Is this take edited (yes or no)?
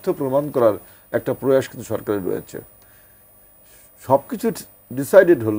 no